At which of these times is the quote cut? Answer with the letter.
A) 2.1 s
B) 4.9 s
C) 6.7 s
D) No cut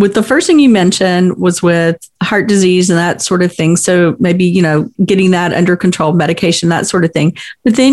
B